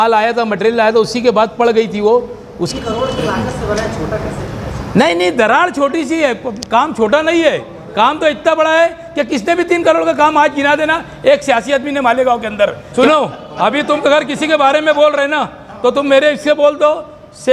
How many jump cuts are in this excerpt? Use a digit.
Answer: 2